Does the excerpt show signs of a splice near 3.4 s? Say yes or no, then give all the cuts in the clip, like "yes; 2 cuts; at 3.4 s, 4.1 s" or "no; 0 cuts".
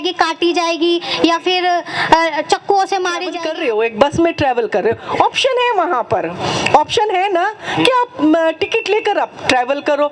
yes; 1 cut; at 3.4 s